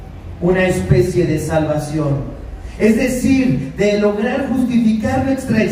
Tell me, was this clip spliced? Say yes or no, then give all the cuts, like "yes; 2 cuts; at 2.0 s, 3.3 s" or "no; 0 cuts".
no; 0 cuts